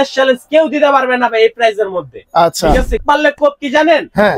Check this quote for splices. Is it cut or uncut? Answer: cut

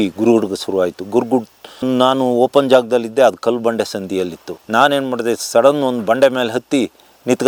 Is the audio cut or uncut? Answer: uncut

